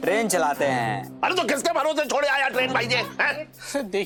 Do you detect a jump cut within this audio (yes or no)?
no